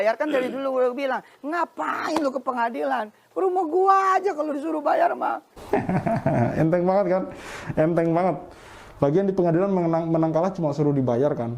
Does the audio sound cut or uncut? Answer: cut